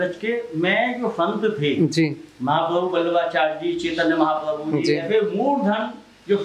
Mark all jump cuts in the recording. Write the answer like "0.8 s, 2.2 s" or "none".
none